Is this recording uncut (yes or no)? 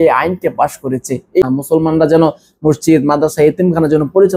no